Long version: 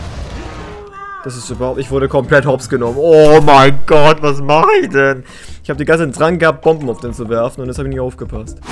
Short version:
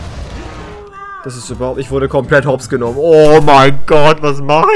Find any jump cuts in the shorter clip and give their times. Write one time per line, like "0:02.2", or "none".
none